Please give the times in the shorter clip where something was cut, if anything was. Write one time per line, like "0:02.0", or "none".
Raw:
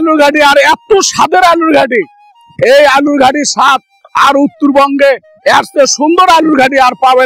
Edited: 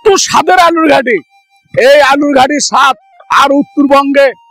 none